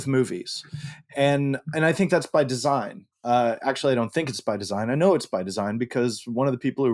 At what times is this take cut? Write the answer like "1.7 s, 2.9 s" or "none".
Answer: none